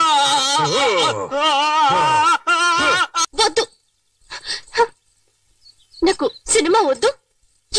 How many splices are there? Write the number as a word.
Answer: one